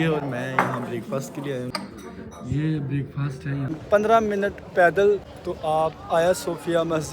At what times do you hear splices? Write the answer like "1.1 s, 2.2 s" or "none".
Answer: 1.7 s, 3.7 s, 5.3 s